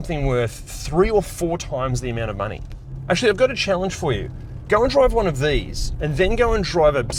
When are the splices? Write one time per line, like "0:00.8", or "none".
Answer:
none